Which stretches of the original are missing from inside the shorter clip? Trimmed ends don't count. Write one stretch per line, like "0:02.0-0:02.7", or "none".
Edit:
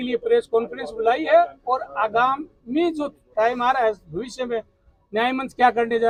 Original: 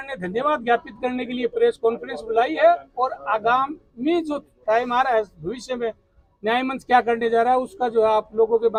none